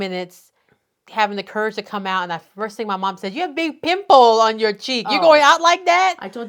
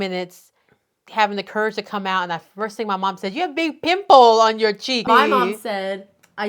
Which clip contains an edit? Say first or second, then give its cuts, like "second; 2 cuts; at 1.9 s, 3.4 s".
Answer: second; 1 cut; at 5.0 s